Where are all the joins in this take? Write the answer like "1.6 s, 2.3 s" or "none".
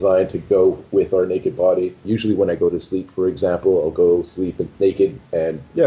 2.0 s

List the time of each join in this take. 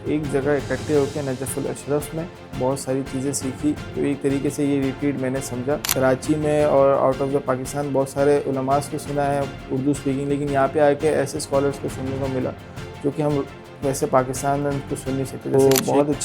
2.4 s, 5.9 s, 15.5 s

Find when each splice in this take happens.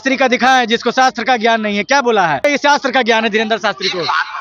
2.4 s

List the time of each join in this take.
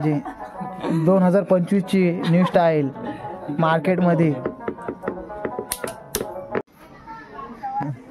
6.7 s

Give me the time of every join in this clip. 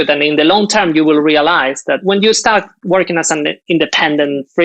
2.0 s, 3.6 s

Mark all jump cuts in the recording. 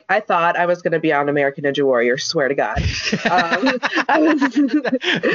none

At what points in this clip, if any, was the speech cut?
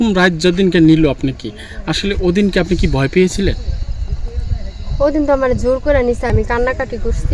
6.3 s

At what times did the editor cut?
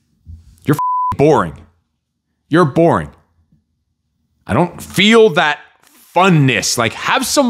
none

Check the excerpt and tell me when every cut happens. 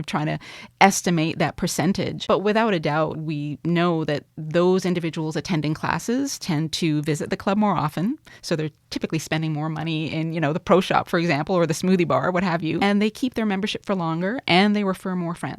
2.2 s, 3.2 s, 12.8 s

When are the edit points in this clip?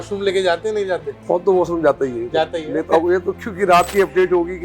1.1 s

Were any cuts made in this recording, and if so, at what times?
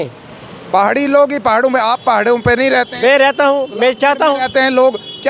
none

